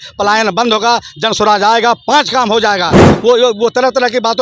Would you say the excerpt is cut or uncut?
cut